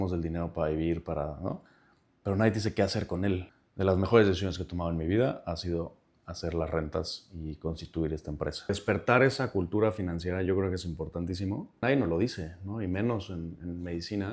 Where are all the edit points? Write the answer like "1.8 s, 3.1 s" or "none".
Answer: 3.5 s, 8.7 s, 11.8 s